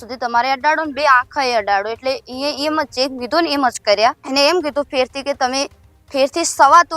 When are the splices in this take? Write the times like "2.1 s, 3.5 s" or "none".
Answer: 4.2 s

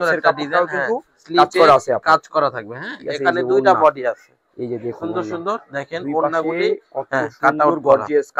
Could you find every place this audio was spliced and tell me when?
none

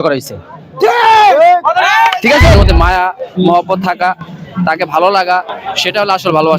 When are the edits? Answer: 2.5 s

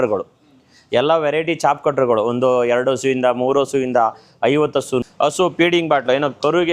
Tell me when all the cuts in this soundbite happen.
5.0 s

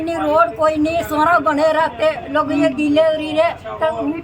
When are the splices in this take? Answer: none

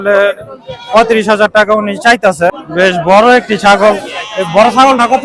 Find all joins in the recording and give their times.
2.5 s

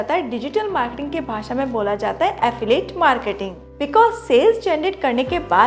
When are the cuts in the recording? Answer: 3.5 s

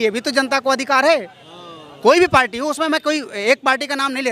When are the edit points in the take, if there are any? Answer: none

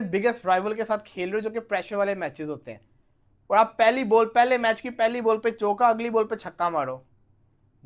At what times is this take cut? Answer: none

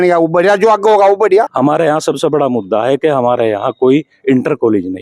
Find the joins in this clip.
1.5 s

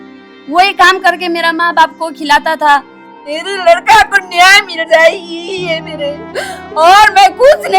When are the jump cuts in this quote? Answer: 3.3 s

